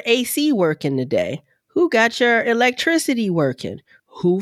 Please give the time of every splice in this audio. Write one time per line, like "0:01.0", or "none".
none